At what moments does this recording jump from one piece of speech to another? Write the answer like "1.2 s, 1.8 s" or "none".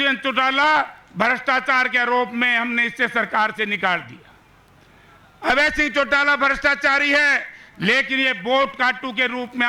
none